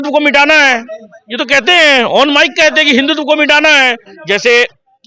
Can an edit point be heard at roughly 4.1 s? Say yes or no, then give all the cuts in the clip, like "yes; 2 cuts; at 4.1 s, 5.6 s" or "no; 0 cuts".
yes; 1 cut; at 4.1 s